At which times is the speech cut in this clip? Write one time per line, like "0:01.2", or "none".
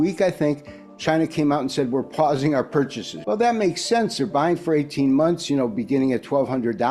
0:03.1